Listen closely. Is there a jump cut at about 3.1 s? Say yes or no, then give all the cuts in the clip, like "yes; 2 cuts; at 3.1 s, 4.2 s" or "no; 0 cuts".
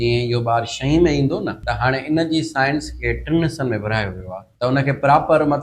no; 2 cuts; at 1.6 s, 4.4 s